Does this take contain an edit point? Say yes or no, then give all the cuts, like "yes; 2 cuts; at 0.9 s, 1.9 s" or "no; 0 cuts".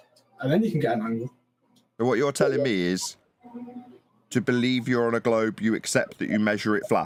no; 0 cuts